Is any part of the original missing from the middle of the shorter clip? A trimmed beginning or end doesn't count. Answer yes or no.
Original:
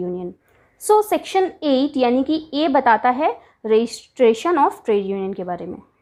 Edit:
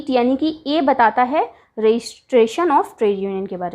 no